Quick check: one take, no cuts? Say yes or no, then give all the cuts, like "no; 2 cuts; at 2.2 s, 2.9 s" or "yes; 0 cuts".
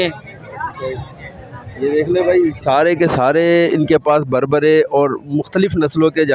yes; 0 cuts